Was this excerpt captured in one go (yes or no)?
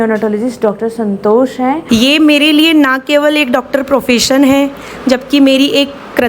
no